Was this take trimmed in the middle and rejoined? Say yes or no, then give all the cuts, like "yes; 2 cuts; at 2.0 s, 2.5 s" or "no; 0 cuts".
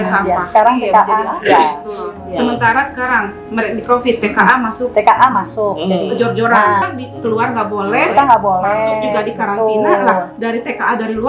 yes; 1 cut; at 6.8 s